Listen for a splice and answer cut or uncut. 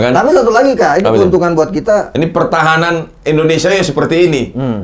cut